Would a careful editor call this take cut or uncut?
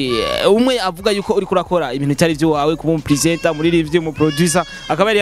uncut